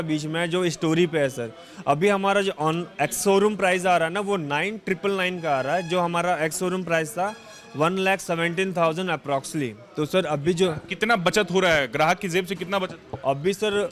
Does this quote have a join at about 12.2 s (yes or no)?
no